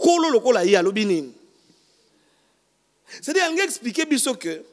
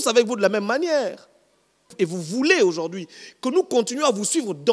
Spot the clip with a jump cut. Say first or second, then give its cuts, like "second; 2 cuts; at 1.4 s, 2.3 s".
second; 1 cut; at 1.9 s